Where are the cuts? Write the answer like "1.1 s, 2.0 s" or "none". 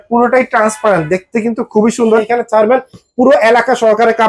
2.2 s